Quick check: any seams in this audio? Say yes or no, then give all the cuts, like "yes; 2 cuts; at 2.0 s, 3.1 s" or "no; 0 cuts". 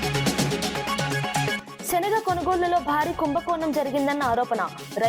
yes; 1 cut; at 1.7 s